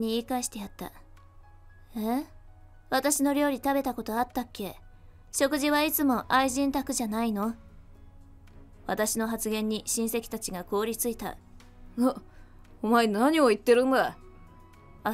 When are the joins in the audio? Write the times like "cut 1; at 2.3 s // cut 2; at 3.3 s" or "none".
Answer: none

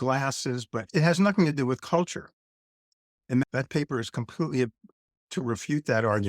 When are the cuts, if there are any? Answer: cut 1; at 0.9 s // cut 2; at 3.4 s

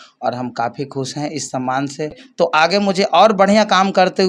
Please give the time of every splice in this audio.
cut 1; at 2.5 s

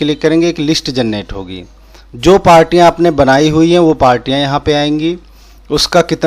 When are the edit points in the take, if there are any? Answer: none

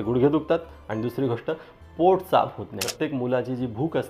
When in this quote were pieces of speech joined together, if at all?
cut 1; at 2.9 s

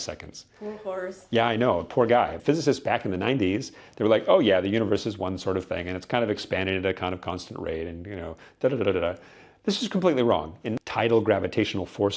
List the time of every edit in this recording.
cut 1; at 2.4 s // cut 2; at 10.7 s

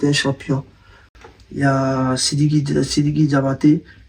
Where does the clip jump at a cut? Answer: cut 1; at 1.1 s

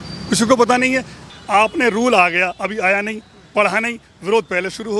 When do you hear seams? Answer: cut 1; at 1.3 s

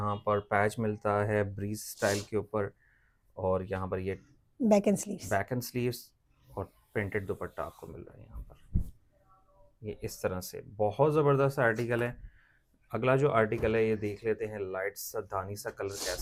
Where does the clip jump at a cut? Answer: none

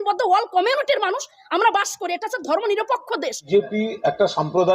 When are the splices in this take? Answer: cut 1; at 3.4 s

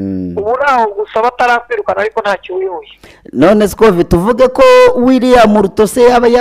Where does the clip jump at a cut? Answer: none

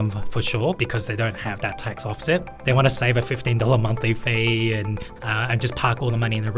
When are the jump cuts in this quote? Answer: cut 1; at 0.8 s // cut 2; at 2.5 s // cut 3; at 5.1 s

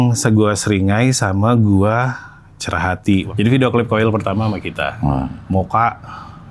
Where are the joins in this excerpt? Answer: cut 1; at 3.3 s // cut 2; at 5.1 s

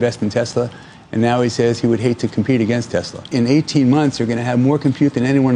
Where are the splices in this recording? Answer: cut 1; at 3.3 s

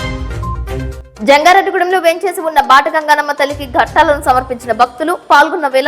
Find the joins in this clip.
cut 1; at 1.0 s

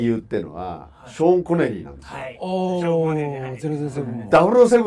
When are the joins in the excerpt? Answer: none

